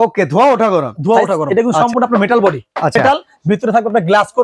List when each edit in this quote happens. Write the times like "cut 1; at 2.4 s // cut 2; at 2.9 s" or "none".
cut 1; at 1.4 s // cut 2; at 3.0 s

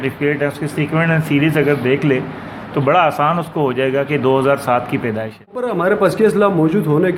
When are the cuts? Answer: cut 1; at 5.7 s

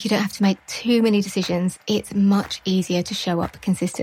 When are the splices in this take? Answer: none

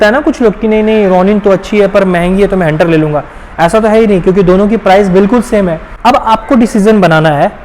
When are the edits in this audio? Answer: cut 1; at 5.9 s

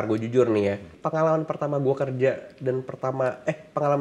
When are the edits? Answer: cut 1; at 1.0 s

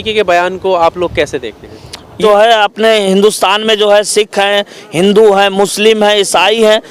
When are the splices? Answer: cut 1; at 2.2 s

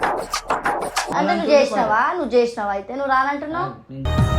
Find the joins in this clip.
cut 1; at 1.1 s

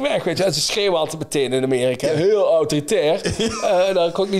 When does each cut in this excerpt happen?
cut 1; at 2.1 s

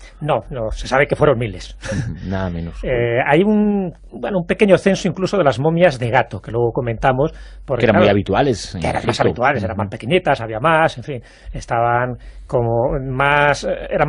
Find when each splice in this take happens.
cut 1; at 7.5 s

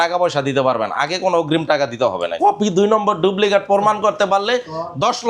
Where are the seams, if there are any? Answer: cut 1; at 2.3 s

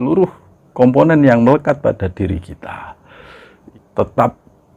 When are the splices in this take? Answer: cut 1; at 3.6 s

